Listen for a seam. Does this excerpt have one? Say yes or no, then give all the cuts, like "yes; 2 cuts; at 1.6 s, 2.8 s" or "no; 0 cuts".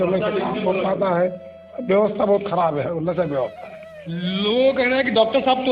no; 0 cuts